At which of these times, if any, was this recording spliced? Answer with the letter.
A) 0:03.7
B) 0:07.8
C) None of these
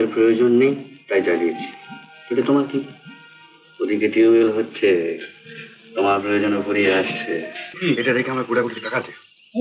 B